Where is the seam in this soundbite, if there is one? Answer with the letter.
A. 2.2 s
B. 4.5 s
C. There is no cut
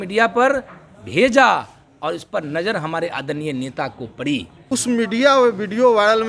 B